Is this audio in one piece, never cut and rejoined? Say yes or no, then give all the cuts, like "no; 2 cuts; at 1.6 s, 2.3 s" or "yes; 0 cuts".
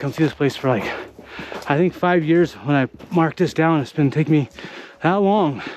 yes; 0 cuts